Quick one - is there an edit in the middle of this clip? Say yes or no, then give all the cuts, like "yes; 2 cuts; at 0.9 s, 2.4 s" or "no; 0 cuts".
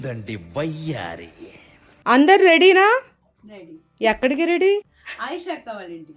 yes; 2 cuts; at 1.9 s, 5.0 s